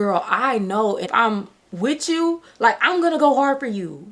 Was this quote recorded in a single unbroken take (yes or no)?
no